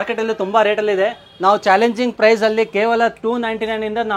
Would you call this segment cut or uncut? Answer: uncut